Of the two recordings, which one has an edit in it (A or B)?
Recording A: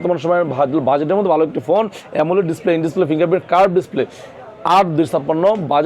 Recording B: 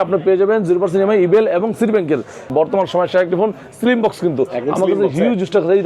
B